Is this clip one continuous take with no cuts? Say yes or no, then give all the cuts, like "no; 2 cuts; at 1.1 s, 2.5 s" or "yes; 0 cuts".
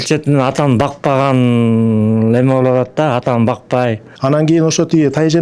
no; 1 cut; at 4.1 s